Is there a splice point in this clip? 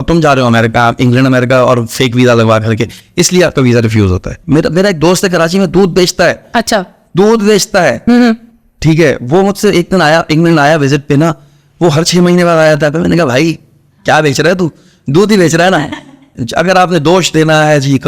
yes; 2 cuts; at 4.3 s, 16.4 s

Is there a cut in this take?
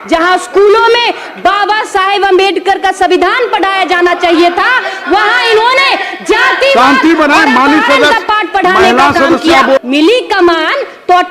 yes; 1 cut; at 9.8 s

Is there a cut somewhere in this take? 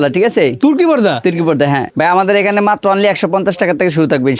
yes; 1 cut; at 1.9 s

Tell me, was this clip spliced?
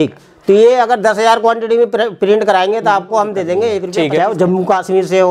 yes; 1 cut; at 3.8 s

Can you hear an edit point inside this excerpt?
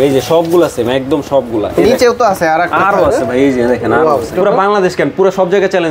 yes; 1 cut; at 4.3 s

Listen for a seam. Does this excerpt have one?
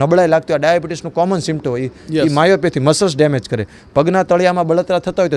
no; 0 cuts

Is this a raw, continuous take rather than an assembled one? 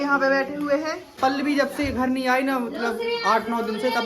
no; 1 cut; at 1.2 s

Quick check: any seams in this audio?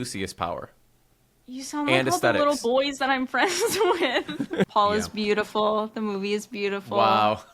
yes; 1 cut; at 4.7 s

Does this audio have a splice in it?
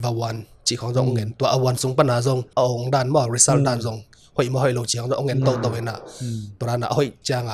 yes; 1 cut; at 2.5 s

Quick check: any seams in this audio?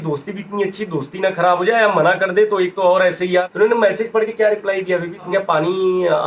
yes; 2 cuts; at 3.5 s, 5.3 s

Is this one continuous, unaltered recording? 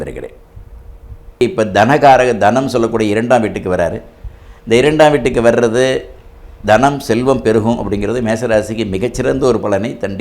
no; 1 cut; at 1.4 s

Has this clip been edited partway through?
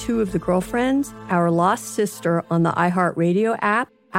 no; 0 cuts

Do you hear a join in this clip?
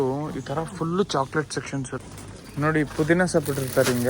yes; 1 cut; at 2.2 s

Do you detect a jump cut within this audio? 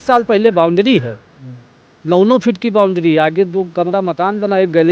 no; 0 cuts

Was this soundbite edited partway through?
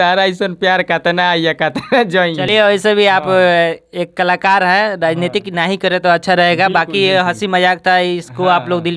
no; 0 cuts

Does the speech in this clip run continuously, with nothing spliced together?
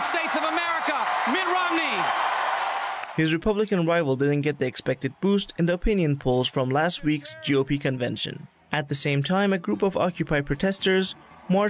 yes; 0 cuts

